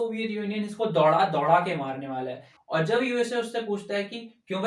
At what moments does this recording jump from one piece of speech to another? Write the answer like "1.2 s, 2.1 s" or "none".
2.5 s